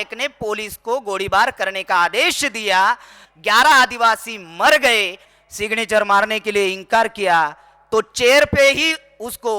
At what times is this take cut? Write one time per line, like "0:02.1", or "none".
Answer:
0:03.2
0:05.3

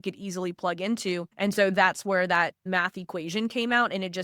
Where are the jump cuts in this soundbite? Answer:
0:01.3
0:02.6

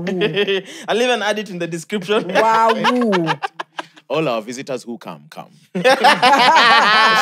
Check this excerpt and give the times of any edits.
none

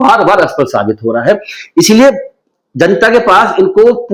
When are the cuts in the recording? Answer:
none

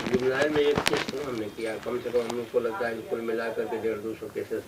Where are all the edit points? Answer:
none

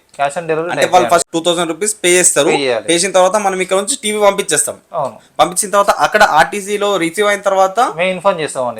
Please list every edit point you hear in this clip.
0:01.3

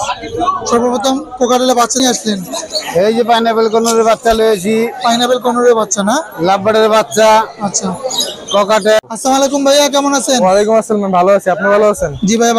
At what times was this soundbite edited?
0:02.0
0:09.0

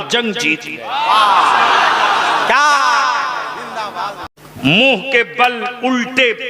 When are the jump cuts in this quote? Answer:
0:04.3

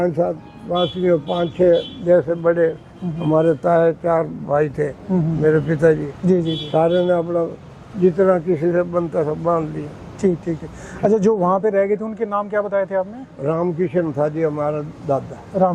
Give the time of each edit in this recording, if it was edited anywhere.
none

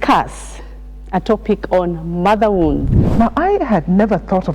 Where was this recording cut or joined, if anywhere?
0:03.0

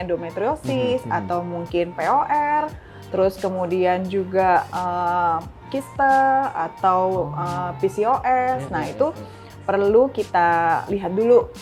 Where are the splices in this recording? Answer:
none

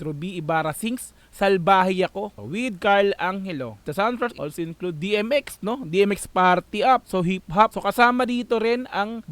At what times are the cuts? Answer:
0:04.4

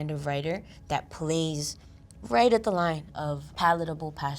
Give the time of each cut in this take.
0:03.1

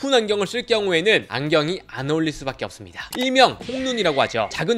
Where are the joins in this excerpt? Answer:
none

